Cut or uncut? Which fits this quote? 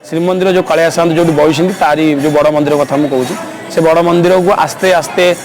uncut